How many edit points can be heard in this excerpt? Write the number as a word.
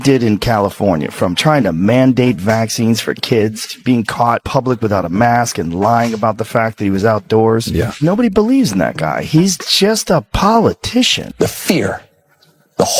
one